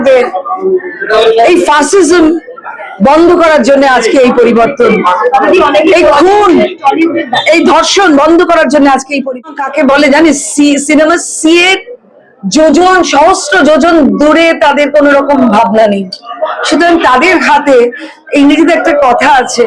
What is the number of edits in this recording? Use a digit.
1